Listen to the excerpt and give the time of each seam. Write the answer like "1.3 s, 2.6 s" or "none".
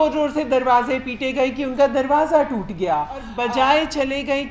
3.3 s